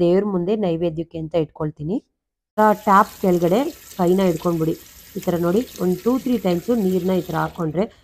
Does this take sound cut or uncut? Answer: cut